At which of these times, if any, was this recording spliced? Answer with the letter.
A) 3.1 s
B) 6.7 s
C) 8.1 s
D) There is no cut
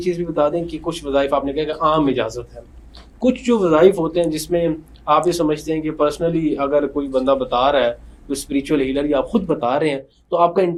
D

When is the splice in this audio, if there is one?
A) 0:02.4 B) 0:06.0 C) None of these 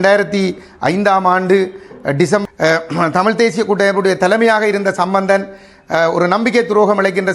A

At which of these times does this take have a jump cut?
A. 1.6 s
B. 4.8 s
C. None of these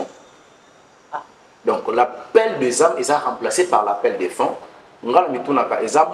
C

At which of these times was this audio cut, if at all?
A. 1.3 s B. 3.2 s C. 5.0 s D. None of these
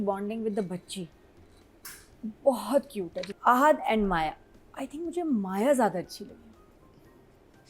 B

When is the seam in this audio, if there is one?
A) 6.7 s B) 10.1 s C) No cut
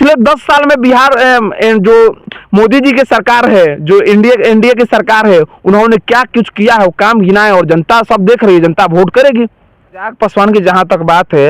B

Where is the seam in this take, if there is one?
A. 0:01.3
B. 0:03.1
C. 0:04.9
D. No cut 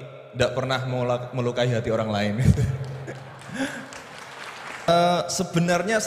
C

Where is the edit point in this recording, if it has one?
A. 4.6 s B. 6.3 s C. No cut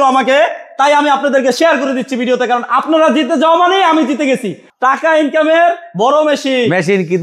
A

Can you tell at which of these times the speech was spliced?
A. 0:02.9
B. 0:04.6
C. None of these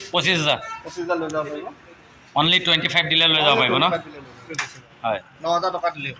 B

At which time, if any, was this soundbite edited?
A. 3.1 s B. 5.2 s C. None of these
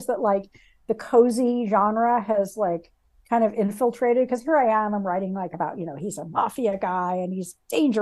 C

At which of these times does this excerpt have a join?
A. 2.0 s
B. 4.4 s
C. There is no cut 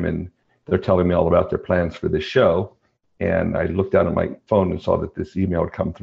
B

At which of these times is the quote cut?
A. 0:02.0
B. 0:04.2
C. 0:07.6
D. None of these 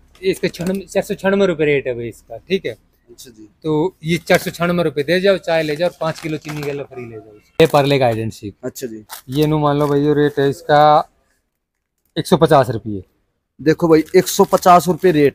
C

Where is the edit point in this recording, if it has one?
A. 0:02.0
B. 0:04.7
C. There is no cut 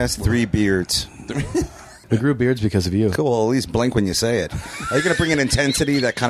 A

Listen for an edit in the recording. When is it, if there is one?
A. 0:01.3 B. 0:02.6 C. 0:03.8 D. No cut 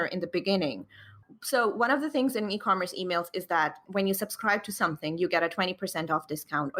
C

